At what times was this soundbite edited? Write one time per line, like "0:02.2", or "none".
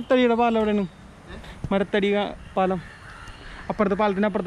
none